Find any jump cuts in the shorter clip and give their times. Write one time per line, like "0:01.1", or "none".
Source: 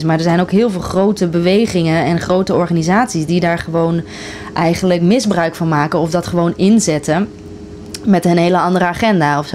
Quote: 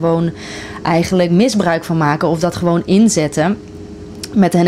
none